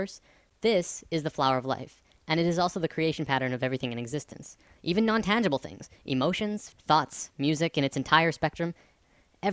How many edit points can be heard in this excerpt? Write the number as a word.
one